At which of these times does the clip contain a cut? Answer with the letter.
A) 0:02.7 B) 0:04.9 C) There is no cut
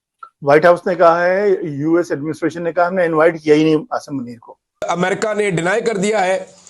B